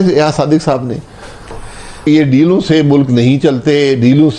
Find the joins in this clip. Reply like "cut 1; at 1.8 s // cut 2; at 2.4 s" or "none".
cut 1; at 1.9 s